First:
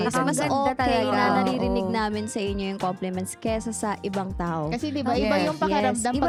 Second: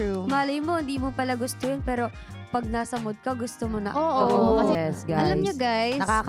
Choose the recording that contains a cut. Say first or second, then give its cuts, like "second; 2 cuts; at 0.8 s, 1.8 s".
second; 1 cut; at 4.8 s